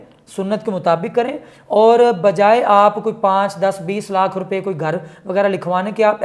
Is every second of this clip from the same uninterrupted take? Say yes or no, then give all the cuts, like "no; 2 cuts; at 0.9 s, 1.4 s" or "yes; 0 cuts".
yes; 0 cuts